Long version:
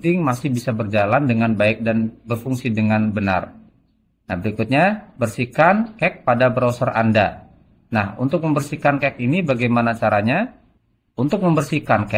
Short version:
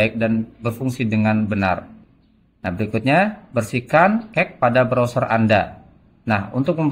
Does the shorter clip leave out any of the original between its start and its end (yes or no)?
no